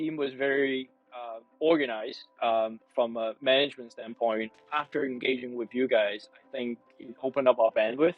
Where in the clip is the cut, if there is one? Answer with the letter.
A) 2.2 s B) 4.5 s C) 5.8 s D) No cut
B